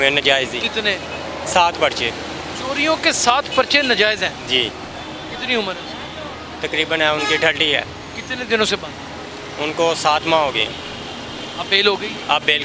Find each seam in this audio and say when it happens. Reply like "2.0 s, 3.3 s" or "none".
none